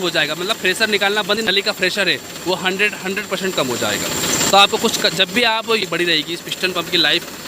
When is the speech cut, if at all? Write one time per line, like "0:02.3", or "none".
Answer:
0:01.5
0:05.8